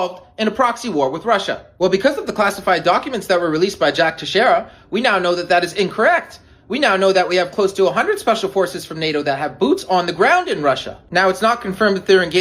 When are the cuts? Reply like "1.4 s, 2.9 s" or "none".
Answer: 1.6 s, 4.8 s, 10.9 s